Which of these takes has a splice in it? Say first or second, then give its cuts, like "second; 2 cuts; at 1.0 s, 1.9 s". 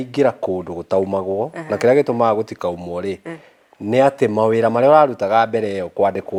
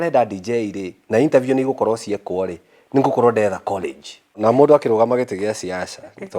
second; 1 cut; at 4.4 s